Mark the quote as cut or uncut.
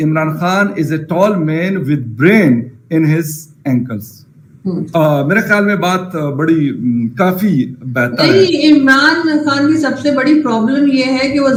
uncut